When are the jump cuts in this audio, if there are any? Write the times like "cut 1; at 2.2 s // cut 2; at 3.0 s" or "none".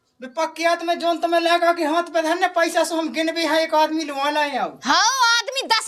none